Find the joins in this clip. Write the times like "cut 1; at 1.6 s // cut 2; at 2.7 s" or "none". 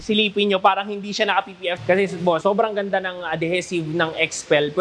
cut 1; at 1.8 s